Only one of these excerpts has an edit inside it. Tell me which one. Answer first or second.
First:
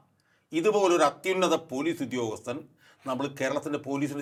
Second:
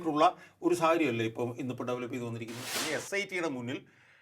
second